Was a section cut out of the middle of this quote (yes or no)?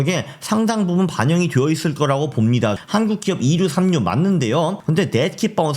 yes